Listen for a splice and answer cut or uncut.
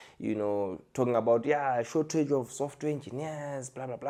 uncut